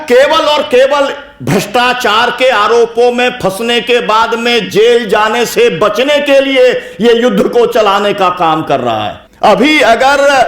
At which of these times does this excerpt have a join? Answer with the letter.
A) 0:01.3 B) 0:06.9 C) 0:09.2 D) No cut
C